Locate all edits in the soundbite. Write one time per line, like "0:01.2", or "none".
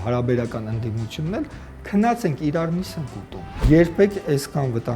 0:03.6